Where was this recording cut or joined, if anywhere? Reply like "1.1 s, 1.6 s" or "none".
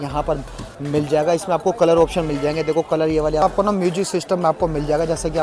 3.4 s